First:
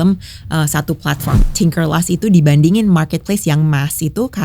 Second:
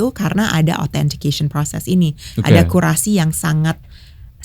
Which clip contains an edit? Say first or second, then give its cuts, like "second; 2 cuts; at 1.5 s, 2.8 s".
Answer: first; 1 cut; at 1.4 s